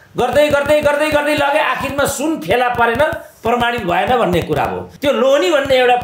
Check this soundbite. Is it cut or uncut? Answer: cut